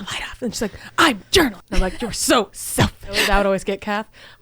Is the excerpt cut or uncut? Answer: cut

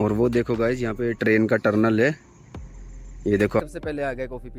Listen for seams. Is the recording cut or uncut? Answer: cut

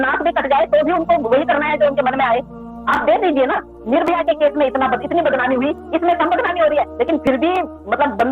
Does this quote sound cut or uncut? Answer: uncut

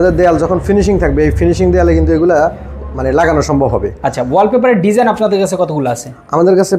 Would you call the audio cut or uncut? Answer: uncut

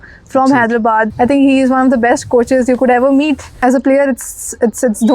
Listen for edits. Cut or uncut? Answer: cut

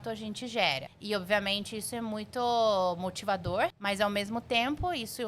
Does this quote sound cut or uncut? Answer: cut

